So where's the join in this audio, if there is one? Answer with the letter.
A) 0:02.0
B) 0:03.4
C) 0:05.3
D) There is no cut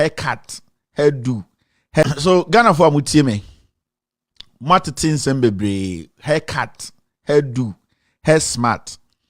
A